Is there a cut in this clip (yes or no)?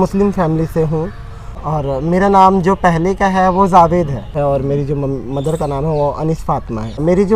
no